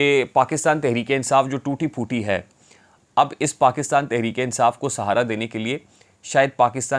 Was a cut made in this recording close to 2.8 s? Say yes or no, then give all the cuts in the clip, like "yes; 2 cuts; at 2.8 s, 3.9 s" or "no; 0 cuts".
no; 0 cuts